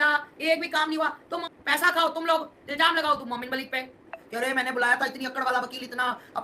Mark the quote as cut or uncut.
cut